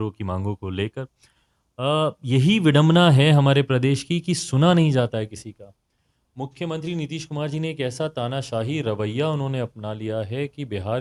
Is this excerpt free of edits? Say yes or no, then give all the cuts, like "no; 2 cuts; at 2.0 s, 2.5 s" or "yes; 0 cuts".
yes; 0 cuts